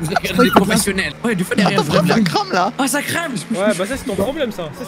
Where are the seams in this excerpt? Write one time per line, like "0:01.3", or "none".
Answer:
0:01.1